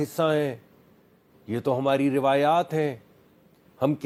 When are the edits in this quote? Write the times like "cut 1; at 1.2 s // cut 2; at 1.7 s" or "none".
none